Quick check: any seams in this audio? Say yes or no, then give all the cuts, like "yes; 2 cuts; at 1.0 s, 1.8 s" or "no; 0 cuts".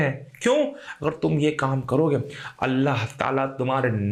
no; 0 cuts